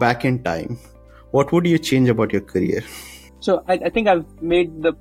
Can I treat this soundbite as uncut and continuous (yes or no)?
yes